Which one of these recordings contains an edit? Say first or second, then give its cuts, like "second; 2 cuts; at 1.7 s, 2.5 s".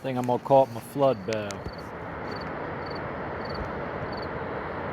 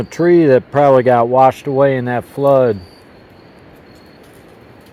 first; 1 cut; at 1.6 s